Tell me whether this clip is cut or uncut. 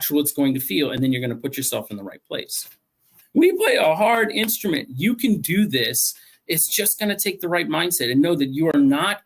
cut